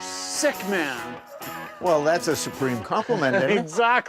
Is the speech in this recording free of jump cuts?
yes; 0 cuts

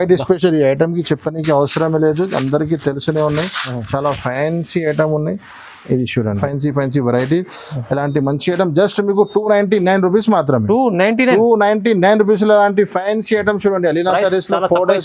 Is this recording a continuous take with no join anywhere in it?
no; 1 cut; at 6.4 s

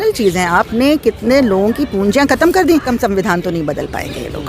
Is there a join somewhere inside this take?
yes; 1 cut; at 2.9 s

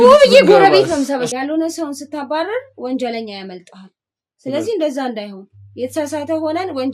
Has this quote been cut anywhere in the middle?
yes; 1 cut; at 1.3 s

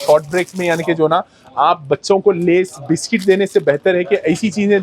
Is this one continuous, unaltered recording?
yes; 0 cuts

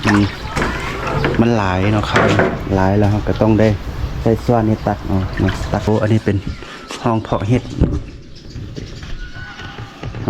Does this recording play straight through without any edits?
no; 1 cut; at 5.9 s

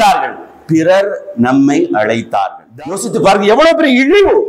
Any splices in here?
yes; 1 cut; at 2.6 s

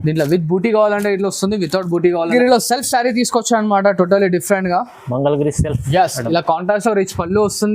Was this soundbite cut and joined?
yes; 1 cut; at 2.3 s

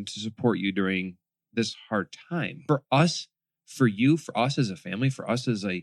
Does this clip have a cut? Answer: yes; 1 cut; at 2.6 s

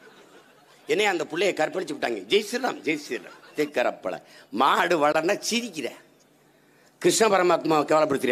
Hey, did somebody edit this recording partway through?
yes; 1 cut; at 3.5 s

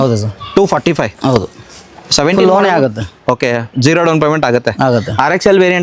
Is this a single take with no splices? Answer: yes; 0 cuts

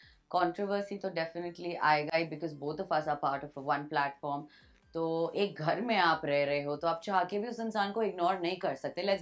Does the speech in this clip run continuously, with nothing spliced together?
yes; 0 cuts

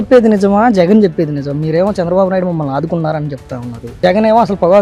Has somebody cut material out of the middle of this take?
no; 0 cuts

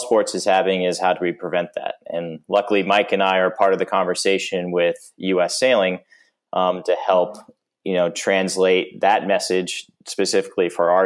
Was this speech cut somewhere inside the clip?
no; 0 cuts

